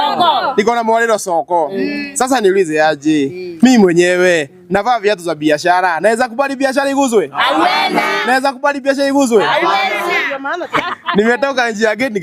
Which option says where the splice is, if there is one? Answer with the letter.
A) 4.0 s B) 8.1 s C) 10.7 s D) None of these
C